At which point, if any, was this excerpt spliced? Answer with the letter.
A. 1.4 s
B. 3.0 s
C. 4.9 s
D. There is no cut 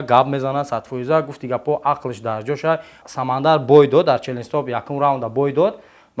B